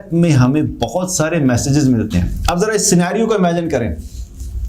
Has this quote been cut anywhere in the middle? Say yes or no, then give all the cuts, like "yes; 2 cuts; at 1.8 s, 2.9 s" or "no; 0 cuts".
no; 0 cuts